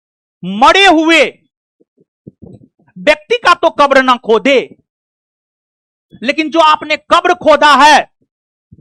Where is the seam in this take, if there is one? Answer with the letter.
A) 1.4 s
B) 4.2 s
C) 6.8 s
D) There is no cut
D